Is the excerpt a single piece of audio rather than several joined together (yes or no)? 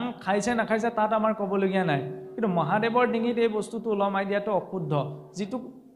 yes